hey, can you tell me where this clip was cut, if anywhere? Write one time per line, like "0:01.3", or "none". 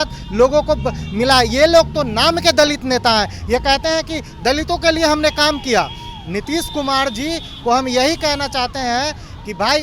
none